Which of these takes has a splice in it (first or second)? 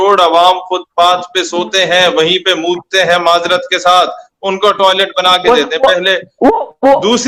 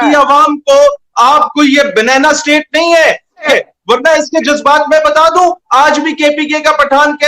second